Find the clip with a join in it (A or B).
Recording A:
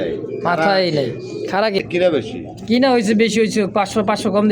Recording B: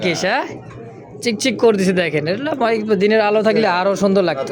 A